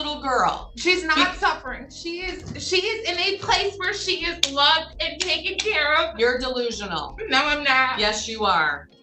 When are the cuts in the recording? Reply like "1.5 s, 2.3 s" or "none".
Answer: none